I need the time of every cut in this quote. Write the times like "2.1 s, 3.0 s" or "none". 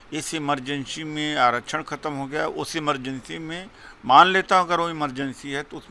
none